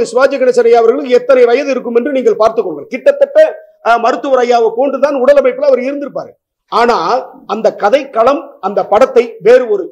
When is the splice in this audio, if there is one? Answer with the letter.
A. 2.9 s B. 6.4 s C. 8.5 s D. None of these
D